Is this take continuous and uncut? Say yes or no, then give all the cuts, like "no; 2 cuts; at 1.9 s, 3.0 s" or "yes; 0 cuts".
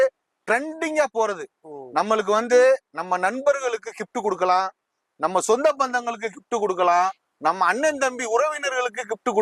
yes; 0 cuts